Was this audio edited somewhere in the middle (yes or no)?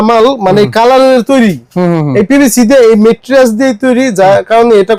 no